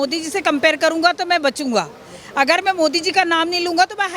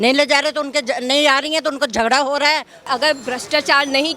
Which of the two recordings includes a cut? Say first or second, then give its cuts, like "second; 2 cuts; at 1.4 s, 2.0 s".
second; 1 cut; at 2.9 s